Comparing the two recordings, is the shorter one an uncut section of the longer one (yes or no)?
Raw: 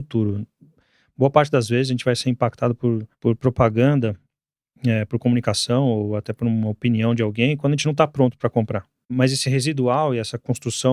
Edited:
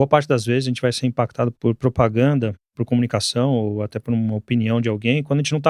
no